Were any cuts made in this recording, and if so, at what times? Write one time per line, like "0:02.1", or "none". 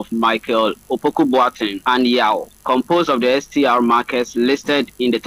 0:01.7